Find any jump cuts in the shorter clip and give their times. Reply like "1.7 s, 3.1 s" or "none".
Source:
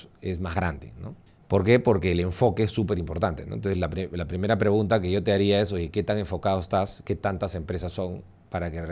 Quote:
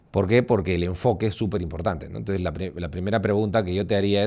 none